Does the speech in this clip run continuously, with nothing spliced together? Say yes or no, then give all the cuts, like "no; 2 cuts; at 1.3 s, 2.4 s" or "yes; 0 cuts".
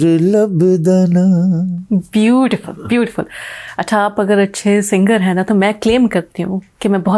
yes; 0 cuts